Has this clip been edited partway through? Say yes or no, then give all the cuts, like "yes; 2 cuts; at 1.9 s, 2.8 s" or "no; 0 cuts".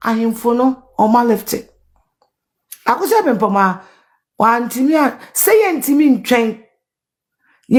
no; 0 cuts